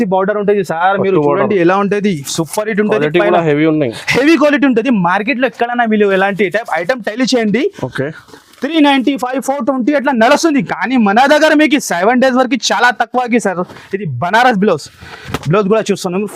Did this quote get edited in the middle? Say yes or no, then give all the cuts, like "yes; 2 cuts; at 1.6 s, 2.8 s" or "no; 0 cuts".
no; 0 cuts